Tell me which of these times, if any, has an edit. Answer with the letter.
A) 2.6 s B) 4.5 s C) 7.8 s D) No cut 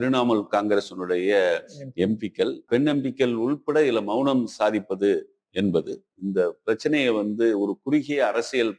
A